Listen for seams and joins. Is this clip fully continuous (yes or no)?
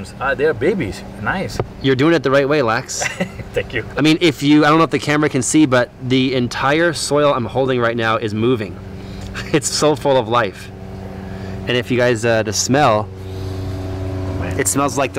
yes